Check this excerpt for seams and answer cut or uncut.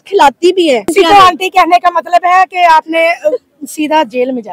cut